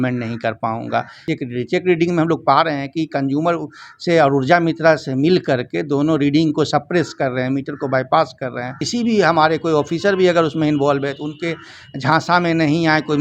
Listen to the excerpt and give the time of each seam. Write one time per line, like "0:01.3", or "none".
0:01.2
0:08.8